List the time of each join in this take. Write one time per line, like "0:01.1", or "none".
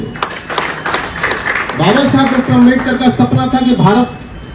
none